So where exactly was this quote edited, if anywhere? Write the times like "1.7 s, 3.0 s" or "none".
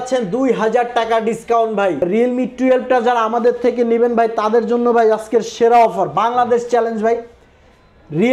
2.0 s